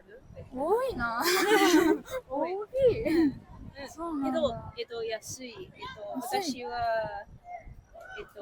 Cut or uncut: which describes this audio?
uncut